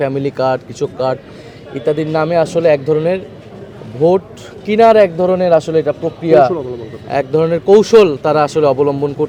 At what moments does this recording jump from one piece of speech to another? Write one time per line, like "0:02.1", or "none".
none